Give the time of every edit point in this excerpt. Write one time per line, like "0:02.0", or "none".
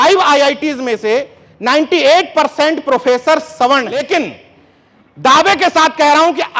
0:04.0